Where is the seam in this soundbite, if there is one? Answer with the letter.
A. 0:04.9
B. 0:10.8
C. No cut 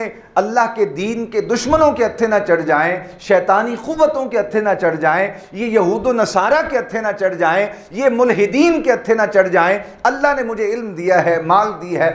C